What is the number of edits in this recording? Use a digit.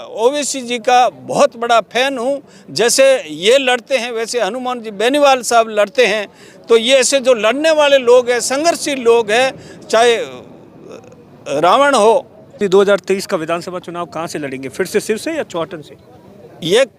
1